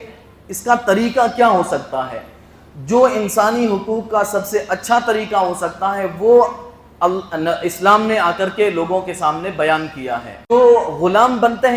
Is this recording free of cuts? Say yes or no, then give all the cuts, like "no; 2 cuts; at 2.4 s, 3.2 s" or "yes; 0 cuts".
no; 1 cut; at 10.5 s